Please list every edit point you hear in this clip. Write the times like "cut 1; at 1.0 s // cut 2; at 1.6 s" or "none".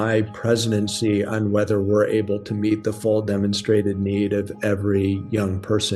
none